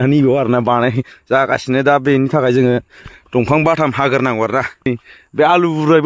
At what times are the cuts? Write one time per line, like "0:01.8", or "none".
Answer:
0:04.9